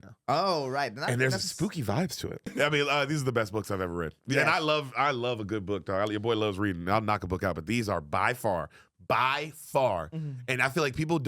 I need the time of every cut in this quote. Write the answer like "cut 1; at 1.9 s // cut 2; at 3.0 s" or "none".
cut 1; at 2.5 s